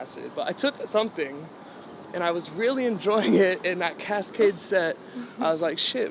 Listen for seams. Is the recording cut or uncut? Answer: uncut